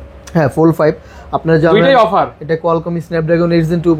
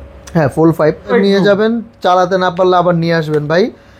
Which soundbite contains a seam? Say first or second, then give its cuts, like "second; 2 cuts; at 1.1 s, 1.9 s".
second; 1 cut; at 1.1 s